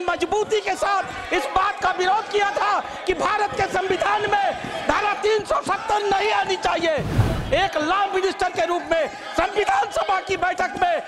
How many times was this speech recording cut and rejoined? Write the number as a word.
one